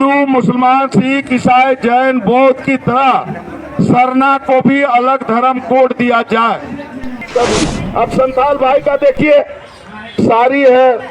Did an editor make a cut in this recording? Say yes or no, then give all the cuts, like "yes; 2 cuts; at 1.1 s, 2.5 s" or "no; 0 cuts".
yes; 1 cut; at 7.1 s